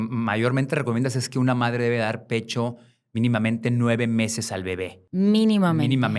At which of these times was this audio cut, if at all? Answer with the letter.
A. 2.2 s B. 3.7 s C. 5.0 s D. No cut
C